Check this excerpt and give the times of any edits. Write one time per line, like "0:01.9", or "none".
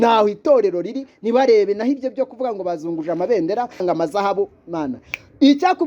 0:03.8